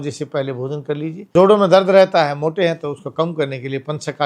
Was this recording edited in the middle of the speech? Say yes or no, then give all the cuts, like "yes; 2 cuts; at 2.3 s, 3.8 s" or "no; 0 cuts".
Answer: yes; 1 cut; at 1.3 s